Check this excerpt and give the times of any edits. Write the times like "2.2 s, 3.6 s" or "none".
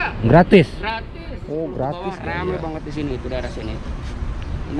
2.1 s

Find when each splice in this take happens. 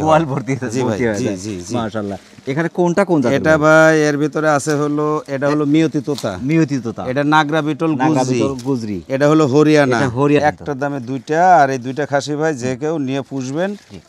10.4 s

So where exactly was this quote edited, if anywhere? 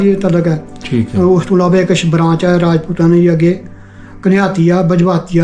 none

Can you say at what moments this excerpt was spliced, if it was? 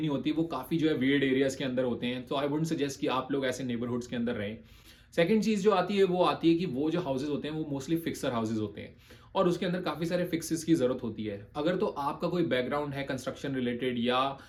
none

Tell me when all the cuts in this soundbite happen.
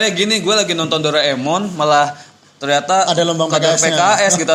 none

